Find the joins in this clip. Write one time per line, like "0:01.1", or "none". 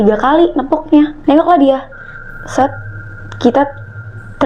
0:01.2